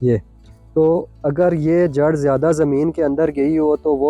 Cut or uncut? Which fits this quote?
uncut